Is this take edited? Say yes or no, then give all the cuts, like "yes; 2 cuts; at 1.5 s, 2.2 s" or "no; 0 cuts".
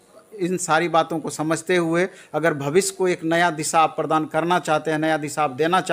no; 0 cuts